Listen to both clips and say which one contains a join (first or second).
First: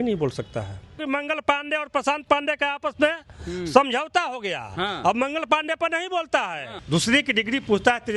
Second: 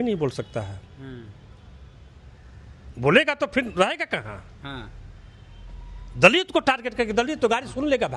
first